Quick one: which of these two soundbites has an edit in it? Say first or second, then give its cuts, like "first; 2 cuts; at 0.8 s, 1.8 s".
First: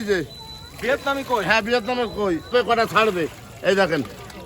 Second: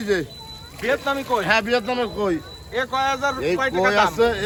first; 1 cut; at 2.5 s